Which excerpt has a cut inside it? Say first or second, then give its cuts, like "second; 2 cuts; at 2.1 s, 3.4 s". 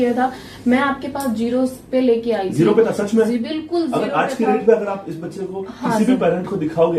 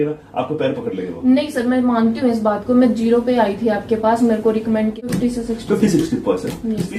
second; 1 cut; at 5.0 s